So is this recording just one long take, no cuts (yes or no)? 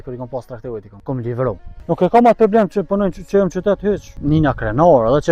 no